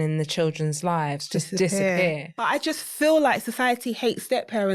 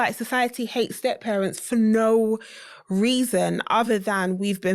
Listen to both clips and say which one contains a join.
first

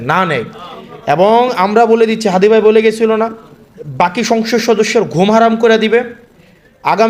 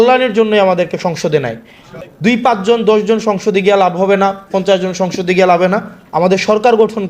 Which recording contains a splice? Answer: second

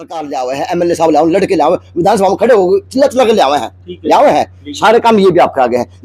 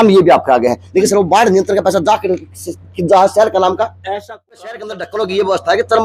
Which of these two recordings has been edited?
second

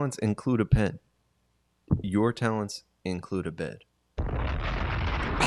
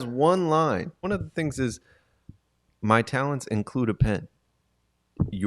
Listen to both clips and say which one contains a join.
second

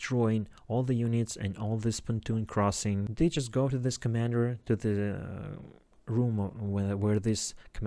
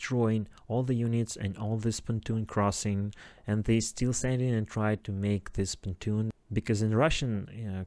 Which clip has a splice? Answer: first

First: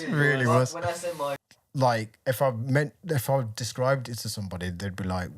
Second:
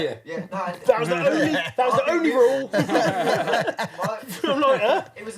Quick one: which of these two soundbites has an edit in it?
first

